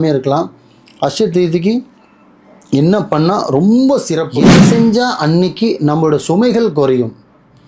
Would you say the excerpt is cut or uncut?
cut